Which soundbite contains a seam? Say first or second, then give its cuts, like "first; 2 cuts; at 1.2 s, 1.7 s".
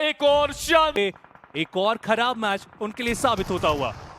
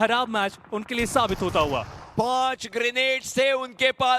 first; 1 cut; at 0.9 s